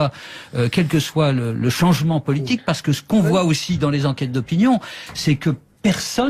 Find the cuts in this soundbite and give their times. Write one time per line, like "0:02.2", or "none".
0:02.7